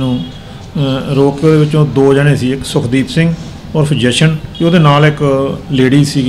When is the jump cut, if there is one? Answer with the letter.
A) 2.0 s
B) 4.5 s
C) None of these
B